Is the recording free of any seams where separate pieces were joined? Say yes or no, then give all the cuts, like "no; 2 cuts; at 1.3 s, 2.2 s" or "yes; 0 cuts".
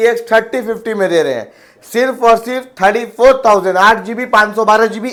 yes; 0 cuts